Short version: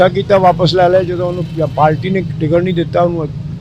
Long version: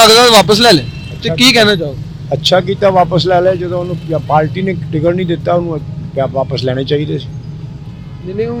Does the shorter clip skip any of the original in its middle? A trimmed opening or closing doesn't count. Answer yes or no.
no